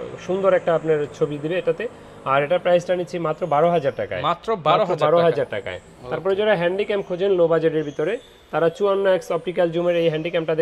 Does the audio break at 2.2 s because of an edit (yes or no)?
no